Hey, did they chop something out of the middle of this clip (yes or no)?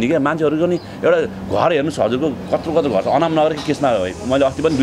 no